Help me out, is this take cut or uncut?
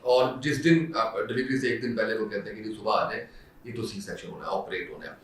uncut